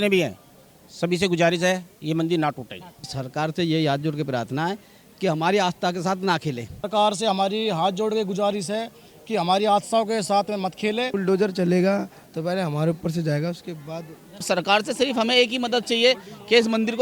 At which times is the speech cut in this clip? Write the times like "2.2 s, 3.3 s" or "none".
3.2 s, 6.9 s, 11.1 s, 14.4 s